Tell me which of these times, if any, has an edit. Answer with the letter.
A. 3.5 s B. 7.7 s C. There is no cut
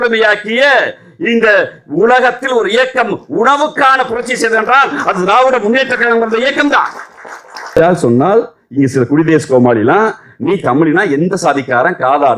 B